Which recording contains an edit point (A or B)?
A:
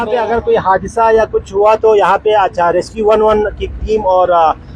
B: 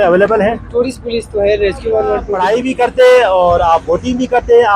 B